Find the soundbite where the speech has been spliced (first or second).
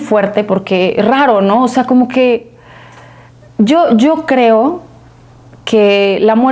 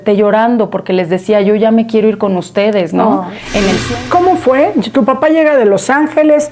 second